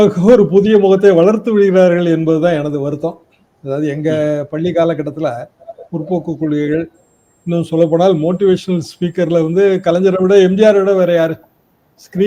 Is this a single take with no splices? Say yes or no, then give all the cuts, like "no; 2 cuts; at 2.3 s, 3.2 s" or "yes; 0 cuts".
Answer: yes; 0 cuts